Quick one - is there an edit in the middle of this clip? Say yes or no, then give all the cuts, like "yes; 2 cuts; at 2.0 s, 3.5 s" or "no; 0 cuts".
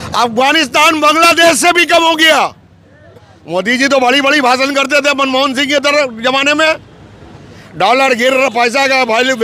no; 0 cuts